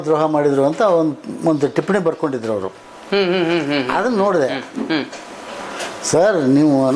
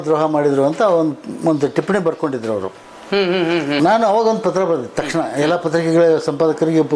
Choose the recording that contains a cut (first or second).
second